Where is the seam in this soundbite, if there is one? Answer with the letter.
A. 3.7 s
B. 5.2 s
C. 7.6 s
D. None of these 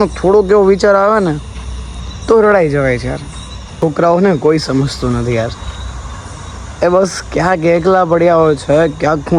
A